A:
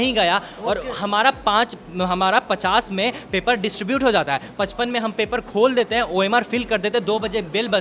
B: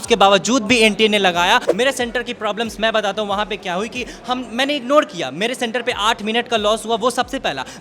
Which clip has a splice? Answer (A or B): B